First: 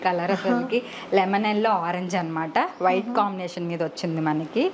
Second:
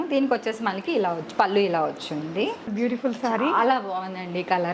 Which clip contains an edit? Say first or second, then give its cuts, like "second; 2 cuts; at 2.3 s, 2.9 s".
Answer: second; 1 cut; at 2.7 s